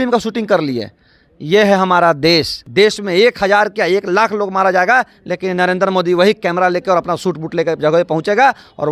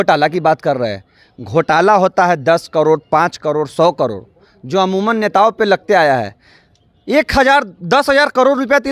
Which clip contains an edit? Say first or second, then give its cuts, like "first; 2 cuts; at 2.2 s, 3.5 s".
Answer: first; 1 cut; at 2.6 s